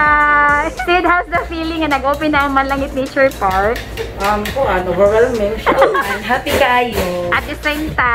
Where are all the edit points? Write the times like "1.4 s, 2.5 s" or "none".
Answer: 0.8 s, 6.1 s